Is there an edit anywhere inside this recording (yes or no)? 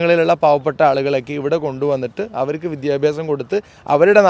no